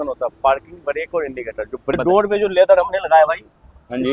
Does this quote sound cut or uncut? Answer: cut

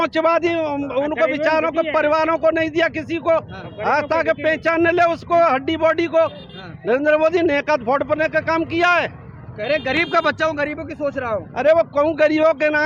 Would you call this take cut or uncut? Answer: uncut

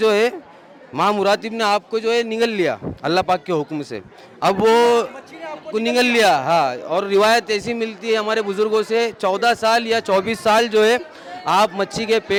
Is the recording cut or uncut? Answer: uncut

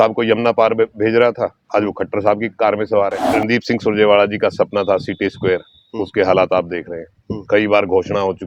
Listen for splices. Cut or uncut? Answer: cut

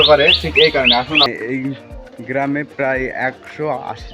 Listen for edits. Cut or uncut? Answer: cut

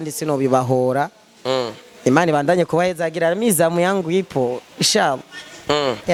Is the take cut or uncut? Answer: uncut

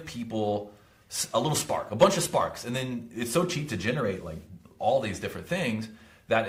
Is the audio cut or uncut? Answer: uncut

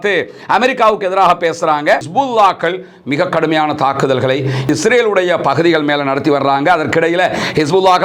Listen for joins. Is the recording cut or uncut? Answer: cut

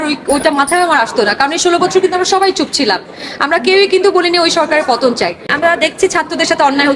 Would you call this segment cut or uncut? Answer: cut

